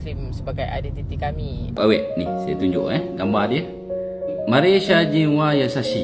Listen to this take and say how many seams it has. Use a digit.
1